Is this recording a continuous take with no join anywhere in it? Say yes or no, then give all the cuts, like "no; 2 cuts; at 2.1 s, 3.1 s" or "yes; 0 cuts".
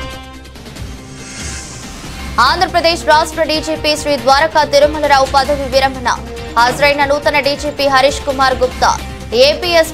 no; 1 cut; at 1.4 s